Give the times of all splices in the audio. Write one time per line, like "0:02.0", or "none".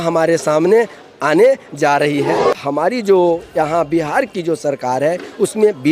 0:02.5